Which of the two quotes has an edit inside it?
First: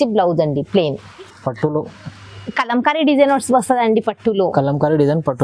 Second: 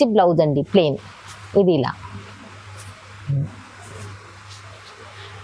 first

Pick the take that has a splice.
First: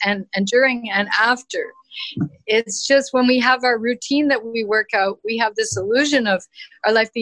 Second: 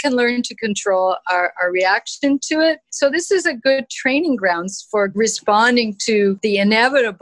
second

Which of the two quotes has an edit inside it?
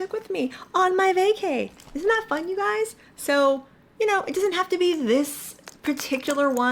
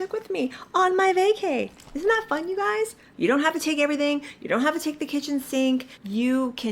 second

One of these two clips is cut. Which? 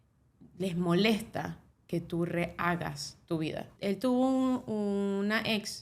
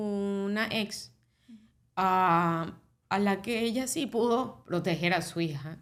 first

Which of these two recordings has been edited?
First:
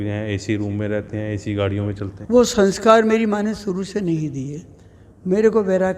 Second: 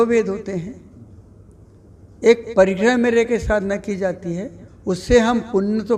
first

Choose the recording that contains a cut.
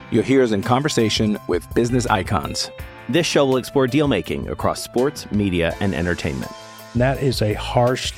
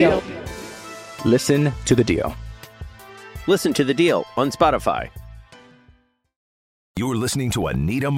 second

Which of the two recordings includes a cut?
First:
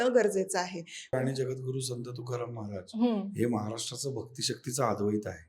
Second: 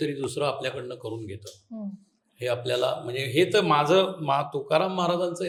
first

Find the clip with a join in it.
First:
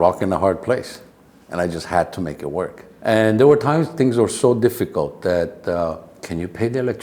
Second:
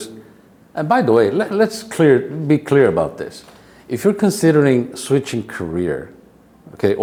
first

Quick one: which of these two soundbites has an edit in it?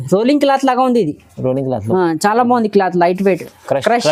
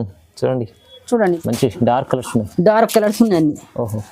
second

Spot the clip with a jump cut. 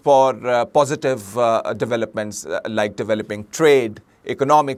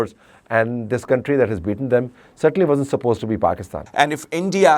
second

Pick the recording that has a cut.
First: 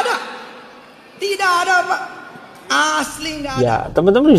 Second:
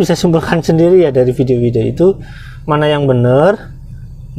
first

